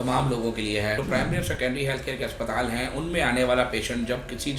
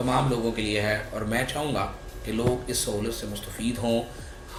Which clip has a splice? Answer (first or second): first